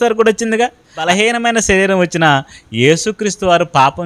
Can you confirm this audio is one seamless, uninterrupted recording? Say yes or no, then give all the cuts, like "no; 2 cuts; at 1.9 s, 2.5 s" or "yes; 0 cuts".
no; 1 cut; at 1.1 s